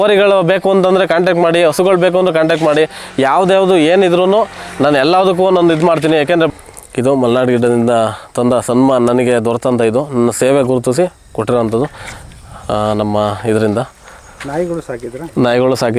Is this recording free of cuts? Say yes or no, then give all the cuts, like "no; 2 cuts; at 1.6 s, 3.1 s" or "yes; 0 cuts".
no; 1 cut; at 6.5 s